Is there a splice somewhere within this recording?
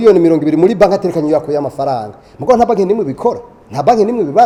no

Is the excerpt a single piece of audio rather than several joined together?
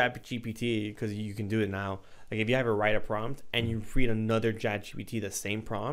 yes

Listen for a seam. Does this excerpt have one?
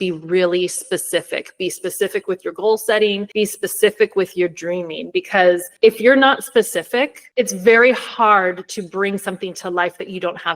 yes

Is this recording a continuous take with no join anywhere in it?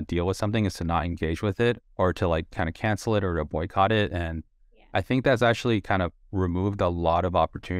no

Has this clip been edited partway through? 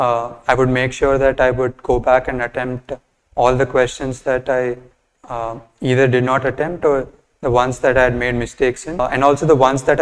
yes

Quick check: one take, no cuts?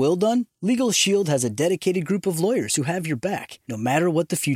yes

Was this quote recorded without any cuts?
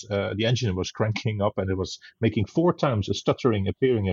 yes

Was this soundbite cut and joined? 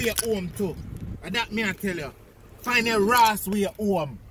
no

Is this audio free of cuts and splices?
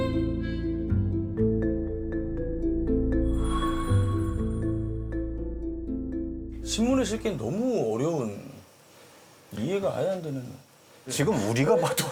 yes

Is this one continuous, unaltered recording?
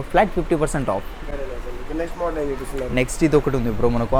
yes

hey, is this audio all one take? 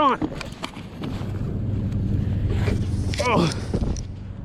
yes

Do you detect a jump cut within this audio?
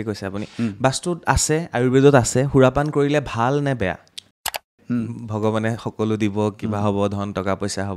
yes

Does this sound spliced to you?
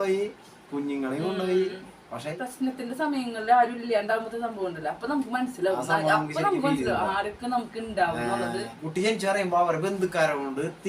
yes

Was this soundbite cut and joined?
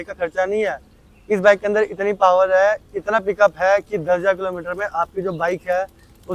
no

